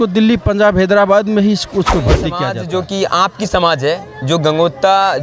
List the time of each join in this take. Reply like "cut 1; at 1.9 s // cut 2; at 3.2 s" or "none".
cut 1; at 2.4 s